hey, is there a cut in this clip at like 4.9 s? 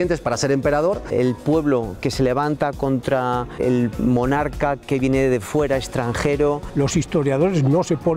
no; 2 cuts; at 1.0 s, 6.7 s

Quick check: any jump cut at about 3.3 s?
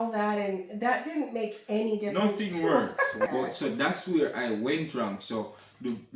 yes; 1 cut; at 3.3 s

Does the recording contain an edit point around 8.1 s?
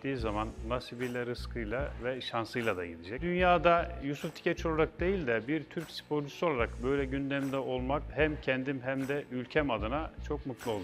yes; 2 cuts; at 3.2 s, 8.1 s

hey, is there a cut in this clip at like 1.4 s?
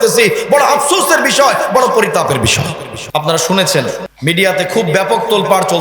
no; 2 cuts; at 2.9 s, 4.1 s

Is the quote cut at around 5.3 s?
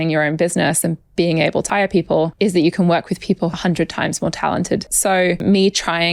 yes; 3 cuts; at 2.0 s, 3.5 s, 5.3 s

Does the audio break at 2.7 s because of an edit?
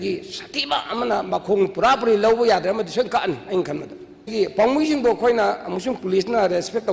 no; 1 cut; at 4.3 s

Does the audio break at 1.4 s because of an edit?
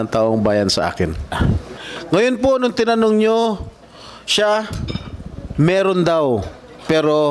yes; 1 cut; at 1.4 s

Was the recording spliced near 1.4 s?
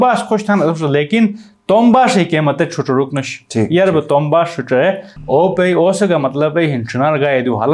no; 1 cut; at 5.1 s

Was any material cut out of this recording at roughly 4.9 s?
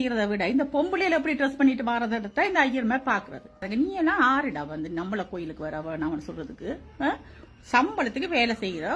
no; 1 cut; at 3.7 s

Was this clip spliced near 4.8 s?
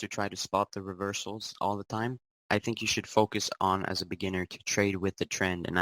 no; 1 cut; at 2.3 s

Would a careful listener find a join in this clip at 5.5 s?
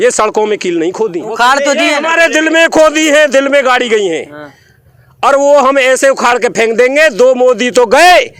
no; 0 cuts

